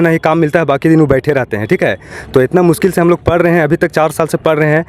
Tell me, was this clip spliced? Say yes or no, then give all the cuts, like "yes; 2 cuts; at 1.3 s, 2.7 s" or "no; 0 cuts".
no; 0 cuts